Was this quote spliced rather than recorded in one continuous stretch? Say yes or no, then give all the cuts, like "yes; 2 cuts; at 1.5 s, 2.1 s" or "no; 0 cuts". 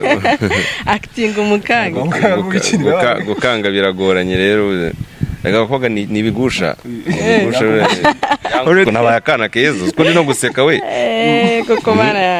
yes; 1 cut; at 8.9 s